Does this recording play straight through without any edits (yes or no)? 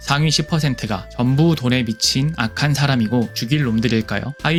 yes